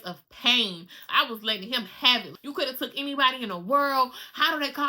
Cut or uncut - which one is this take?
cut